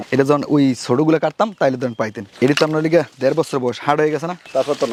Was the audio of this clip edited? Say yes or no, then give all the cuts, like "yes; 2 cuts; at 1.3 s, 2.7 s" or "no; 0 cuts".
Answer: no; 0 cuts